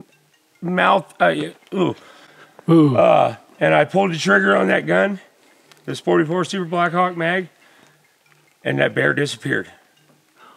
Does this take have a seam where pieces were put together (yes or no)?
no